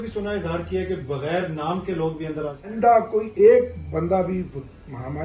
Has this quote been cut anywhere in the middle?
yes; 1 cut; at 2.7 s

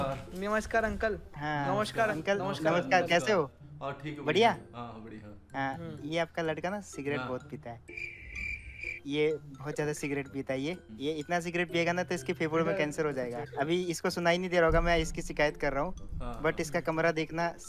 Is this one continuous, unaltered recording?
yes; 0 cuts

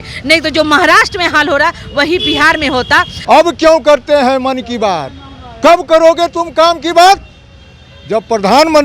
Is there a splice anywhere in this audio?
yes; 1 cut; at 3.1 s

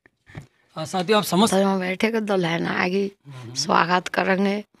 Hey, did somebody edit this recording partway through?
yes; 1 cut; at 1.5 s

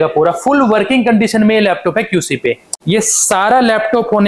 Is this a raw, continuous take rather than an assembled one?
no; 1 cut; at 2.7 s

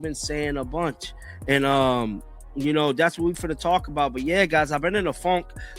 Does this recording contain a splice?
yes; 1 cut; at 4.8 s

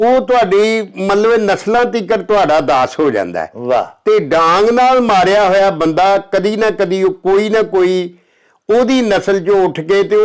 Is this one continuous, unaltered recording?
yes; 0 cuts

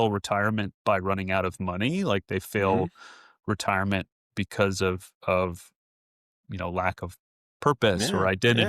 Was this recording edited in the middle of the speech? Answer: no; 0 cuts

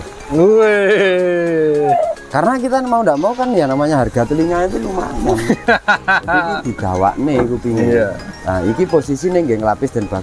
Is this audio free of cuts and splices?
yes; 0 cuts

